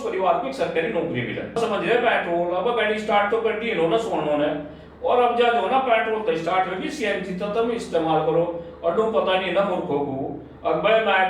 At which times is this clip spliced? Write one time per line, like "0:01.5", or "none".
0:01.6